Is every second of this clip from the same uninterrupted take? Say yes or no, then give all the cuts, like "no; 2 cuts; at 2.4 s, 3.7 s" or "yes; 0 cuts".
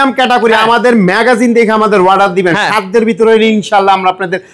yes; 0 cuts